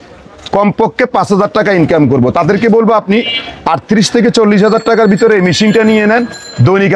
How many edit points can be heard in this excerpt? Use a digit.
0